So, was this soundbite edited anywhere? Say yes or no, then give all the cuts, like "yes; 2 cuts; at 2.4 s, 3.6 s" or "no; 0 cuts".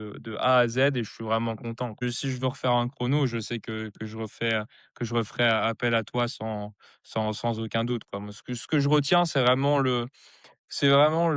yes; 1 cut; at 2.0 s